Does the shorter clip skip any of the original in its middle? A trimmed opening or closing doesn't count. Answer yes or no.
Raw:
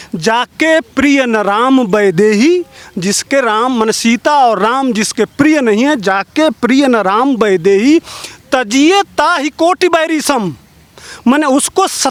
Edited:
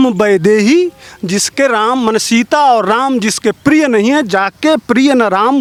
no